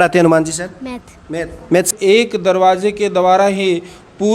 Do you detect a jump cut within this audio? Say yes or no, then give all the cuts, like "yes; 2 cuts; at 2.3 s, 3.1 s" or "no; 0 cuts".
yes; 1 cut; at 1.9 s